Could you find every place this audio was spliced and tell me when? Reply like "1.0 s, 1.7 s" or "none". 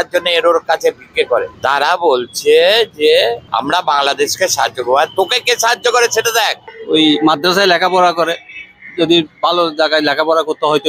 3.4 s, 6.6 s